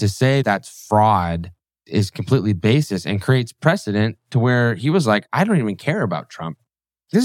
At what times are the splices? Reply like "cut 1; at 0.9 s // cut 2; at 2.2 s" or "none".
cut 1; at 5.3 s